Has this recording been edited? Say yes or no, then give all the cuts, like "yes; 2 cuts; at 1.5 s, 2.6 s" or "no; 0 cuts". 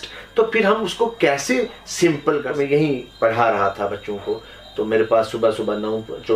yes; 1 cut; at 2.5 s